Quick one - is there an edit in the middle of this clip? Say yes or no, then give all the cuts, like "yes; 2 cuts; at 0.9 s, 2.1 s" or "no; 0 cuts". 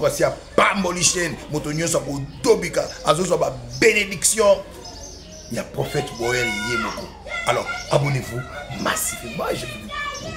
no; 0 cuts